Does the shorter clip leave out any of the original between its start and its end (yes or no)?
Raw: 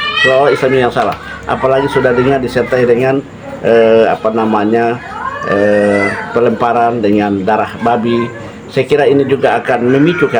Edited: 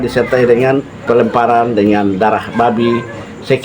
yes